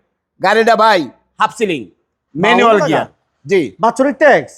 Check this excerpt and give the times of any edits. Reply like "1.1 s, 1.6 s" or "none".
none